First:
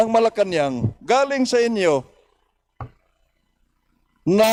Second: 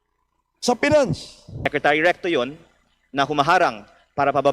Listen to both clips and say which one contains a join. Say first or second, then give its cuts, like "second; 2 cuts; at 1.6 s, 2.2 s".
second; 1 cut; at 1.7 s